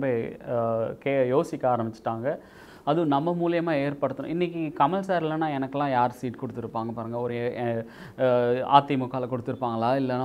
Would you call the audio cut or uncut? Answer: cut